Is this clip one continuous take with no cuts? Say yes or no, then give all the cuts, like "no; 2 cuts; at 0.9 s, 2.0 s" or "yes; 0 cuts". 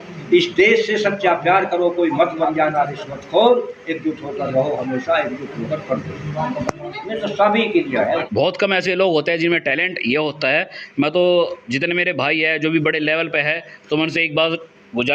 no; 1 cut; at 8.2 s